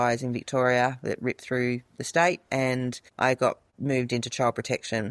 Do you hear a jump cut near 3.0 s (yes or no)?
yes